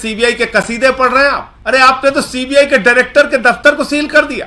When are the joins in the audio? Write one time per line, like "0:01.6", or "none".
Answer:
0:01.5

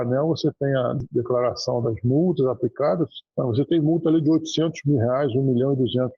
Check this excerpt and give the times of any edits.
0:03.3

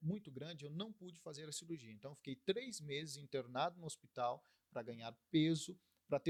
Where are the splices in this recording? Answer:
none

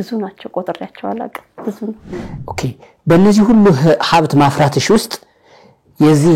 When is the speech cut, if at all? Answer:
0:02.4

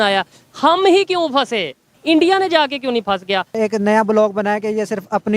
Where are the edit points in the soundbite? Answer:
0:01.9
0:03.6

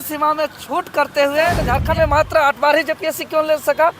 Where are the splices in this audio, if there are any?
0:01.6

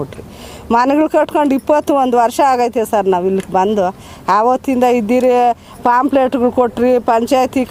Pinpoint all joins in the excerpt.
none

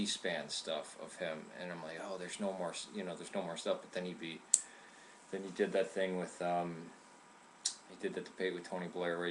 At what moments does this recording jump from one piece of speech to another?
0:06.0

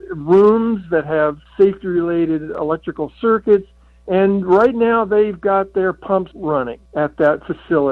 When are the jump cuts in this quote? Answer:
0:01.4
0:02.5
0:06.5

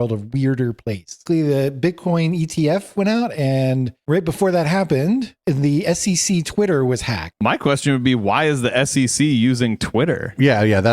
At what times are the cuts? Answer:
0:01.2
0:07.3

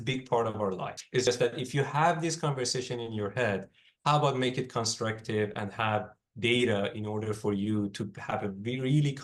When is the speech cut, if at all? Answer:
0:01.3

